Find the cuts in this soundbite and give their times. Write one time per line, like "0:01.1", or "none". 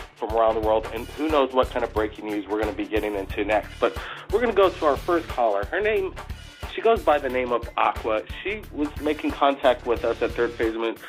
0:07.0

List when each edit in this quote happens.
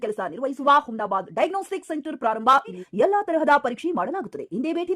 0:02.8

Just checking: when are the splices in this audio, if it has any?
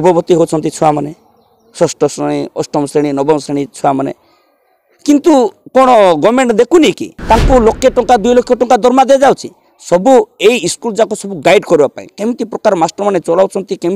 0:07.1

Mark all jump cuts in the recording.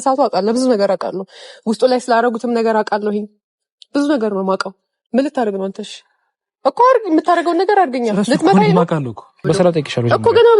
0:09.4

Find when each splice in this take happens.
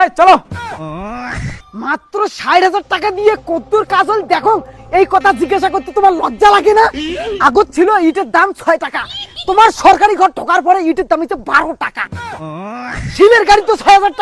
0:01.6

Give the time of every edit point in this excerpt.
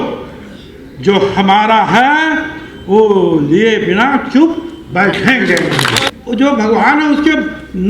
0:06.1

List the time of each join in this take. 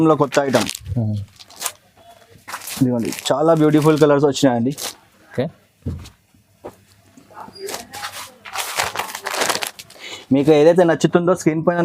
none

